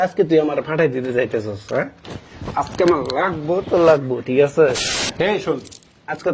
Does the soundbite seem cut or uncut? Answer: cut